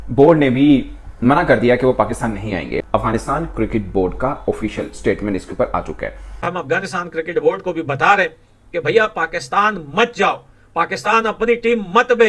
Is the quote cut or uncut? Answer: cut